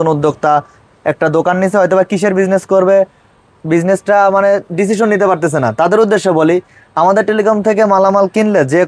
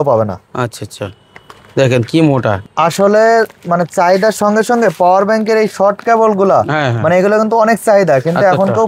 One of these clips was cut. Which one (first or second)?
second